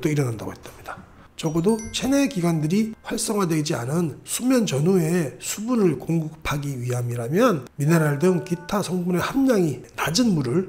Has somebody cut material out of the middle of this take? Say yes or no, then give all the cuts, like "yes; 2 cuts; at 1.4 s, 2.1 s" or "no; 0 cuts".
yes; 1 cut; at 1.2 s